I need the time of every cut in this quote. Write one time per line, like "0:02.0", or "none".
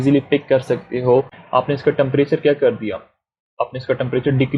0:01.4